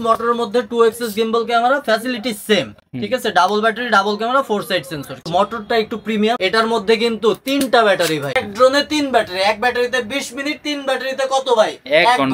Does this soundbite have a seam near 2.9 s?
no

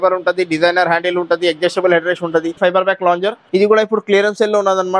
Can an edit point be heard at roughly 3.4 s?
yes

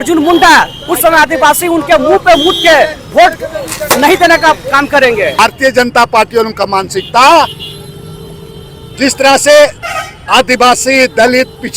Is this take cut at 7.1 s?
no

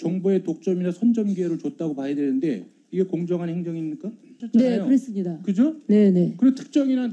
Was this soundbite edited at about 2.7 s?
no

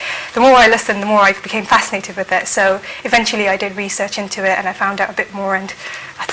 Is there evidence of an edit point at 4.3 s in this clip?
yes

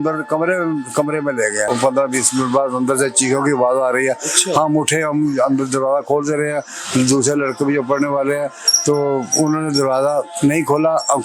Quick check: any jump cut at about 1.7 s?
yes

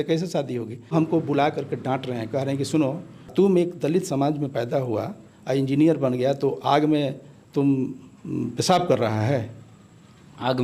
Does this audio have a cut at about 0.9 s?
yes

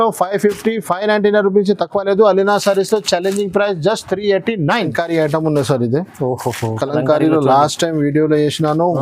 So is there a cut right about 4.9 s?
yes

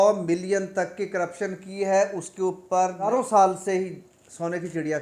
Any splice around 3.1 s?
yes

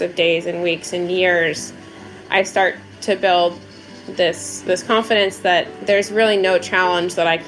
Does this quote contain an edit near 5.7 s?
yes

